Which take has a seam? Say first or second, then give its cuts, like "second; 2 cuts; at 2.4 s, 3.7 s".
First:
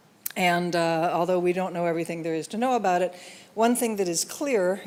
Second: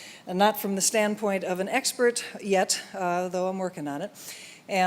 second; 1 cut; at 2.9 s